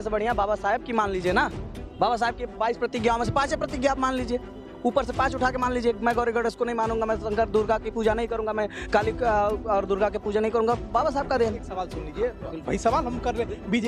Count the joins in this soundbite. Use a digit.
0